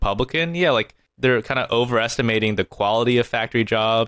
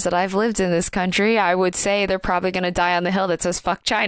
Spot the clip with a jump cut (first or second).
first